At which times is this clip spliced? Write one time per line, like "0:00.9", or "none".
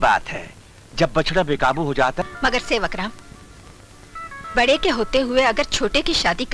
0:02.2